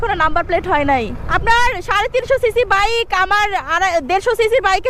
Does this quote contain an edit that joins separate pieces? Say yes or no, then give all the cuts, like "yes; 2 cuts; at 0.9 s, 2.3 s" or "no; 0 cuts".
yes; 1 cut; at 1.3 s